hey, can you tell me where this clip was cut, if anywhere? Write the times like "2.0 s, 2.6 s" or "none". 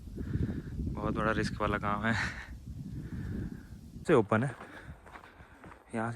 4.0 s